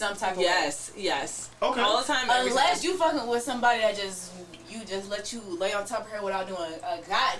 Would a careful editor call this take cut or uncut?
uncut